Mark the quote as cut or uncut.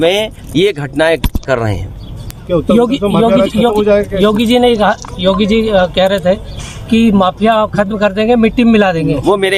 uncut